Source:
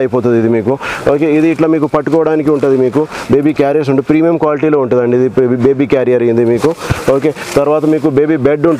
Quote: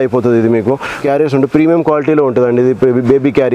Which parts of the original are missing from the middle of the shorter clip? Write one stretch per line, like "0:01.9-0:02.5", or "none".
0:01.0-0:03.6